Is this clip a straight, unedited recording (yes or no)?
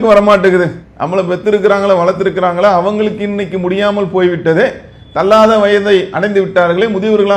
yes